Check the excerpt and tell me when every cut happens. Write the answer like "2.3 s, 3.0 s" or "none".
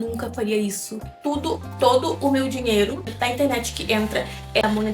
0.9 s